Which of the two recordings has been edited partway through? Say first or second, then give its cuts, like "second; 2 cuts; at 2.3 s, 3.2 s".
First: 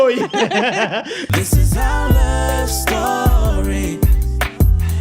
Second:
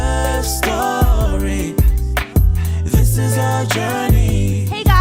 first; 1 cut; at 1.2 s